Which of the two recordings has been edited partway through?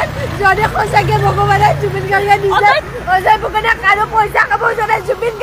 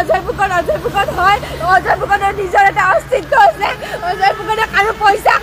first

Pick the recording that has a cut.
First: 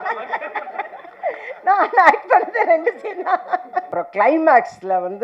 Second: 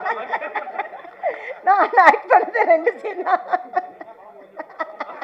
first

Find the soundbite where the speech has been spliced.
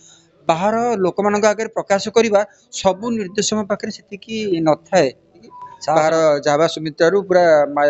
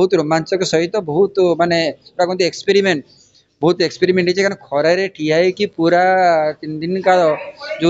first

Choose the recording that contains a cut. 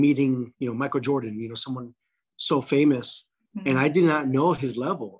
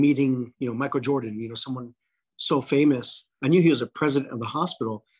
second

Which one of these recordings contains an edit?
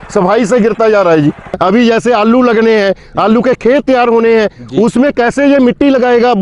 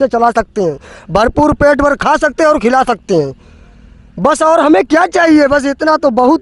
first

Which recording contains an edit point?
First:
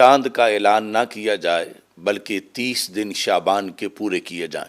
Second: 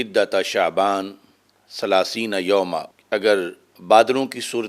second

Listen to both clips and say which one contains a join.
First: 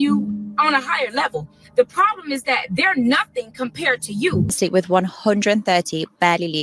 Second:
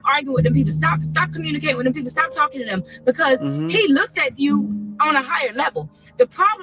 first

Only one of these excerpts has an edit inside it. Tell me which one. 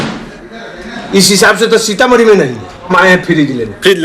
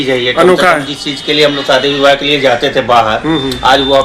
first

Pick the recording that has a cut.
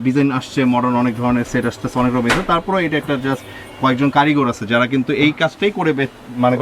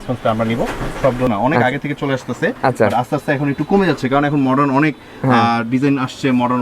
second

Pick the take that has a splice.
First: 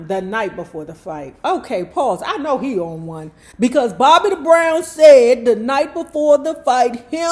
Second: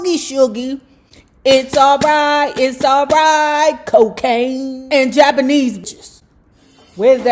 second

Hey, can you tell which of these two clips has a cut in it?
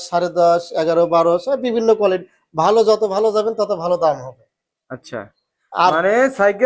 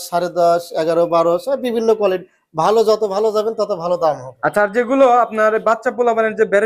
second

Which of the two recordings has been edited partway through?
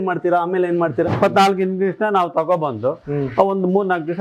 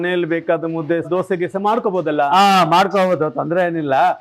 first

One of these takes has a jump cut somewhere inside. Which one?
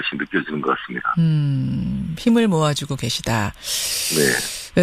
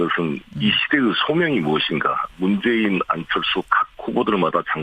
first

